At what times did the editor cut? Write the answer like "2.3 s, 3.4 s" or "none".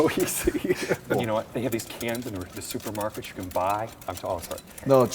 1.1 s